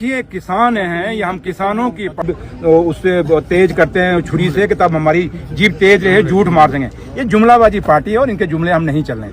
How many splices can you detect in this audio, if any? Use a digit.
1